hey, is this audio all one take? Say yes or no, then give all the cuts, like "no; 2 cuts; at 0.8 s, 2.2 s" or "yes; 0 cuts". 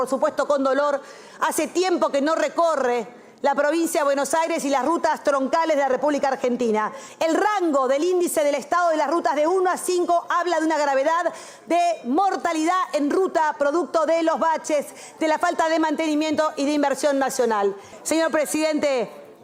no; 2 cuts; at 7.0 s, 17.9 s